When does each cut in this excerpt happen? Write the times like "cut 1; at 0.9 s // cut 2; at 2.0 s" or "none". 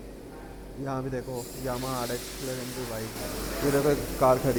none